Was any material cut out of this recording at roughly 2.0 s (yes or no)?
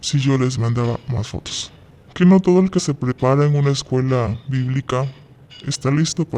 yes